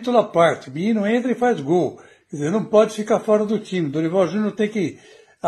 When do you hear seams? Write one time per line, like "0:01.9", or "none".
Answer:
none